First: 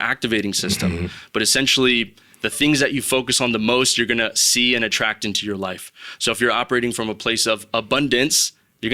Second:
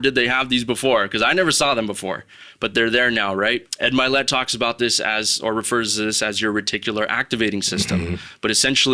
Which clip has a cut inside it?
second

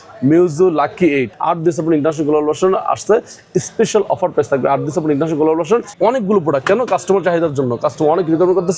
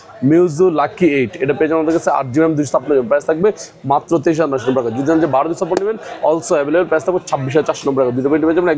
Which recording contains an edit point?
first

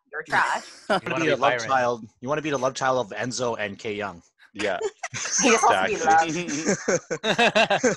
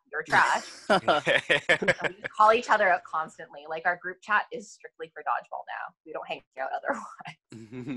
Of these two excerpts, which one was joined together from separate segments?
first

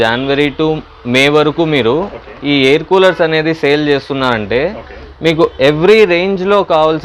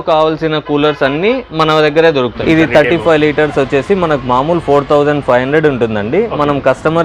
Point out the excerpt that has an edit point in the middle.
second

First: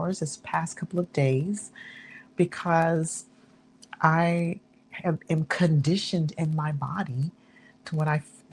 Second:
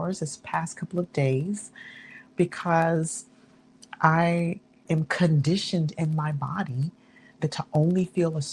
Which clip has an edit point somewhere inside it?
second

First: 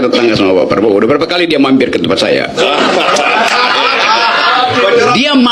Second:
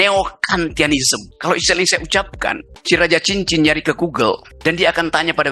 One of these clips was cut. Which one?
second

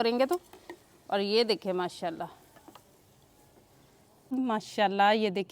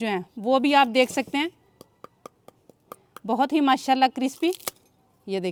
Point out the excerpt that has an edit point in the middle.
first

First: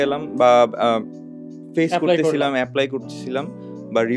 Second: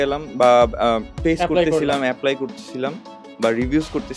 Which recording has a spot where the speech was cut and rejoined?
second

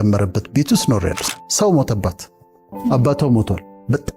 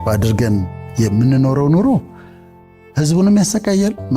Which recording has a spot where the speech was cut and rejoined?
first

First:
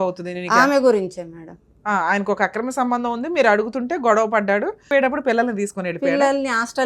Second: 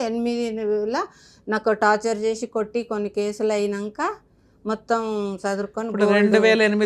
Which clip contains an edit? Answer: first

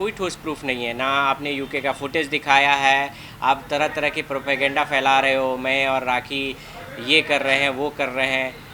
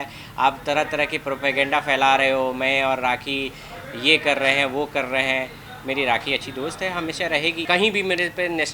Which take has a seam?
second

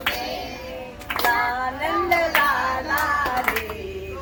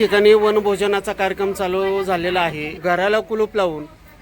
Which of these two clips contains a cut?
second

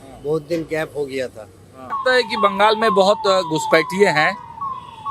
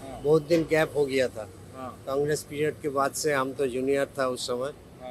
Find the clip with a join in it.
first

